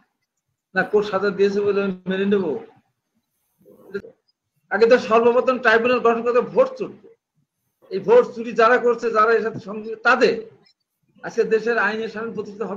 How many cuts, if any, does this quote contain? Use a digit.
1